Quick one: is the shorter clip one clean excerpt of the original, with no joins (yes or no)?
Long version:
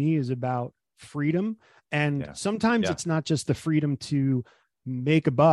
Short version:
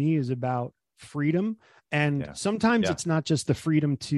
yes